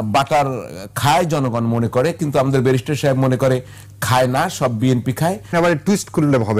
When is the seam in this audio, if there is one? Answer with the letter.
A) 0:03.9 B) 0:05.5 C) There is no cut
B